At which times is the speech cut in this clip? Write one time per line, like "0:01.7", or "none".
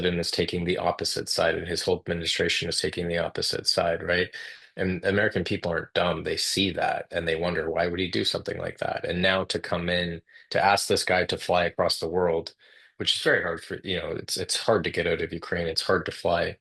none

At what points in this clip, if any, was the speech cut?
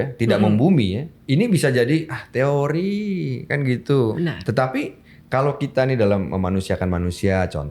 0:01.1
0:04.2

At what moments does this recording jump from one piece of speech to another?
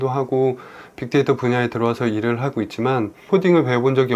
0:03.2

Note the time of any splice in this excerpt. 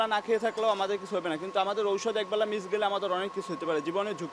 none

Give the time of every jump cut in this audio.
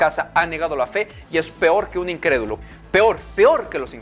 0:02.6

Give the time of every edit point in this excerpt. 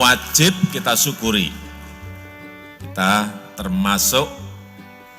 0:04.3

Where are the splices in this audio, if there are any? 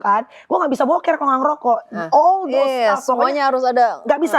none

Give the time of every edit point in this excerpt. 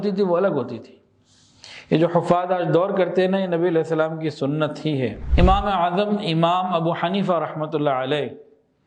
0:05.2

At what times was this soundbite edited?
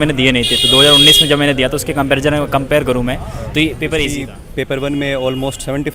0:04.1

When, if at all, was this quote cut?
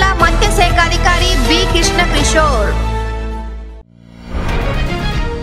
0:03.7

